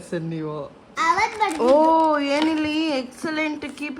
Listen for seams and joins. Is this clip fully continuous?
no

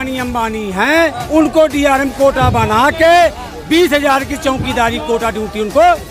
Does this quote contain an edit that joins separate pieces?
yes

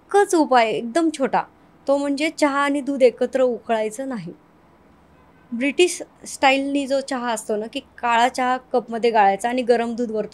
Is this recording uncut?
yes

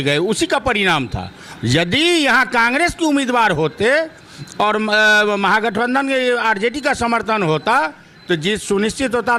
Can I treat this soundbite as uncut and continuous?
yes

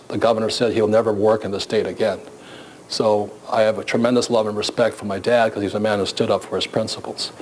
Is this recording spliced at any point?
no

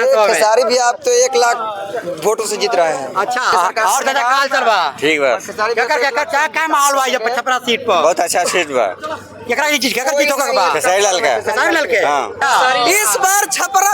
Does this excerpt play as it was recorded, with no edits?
no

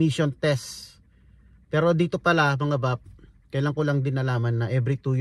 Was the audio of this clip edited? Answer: no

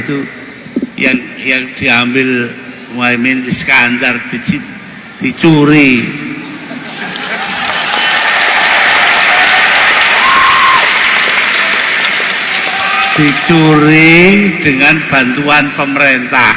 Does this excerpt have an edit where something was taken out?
no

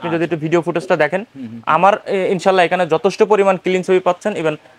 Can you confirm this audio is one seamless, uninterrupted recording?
yes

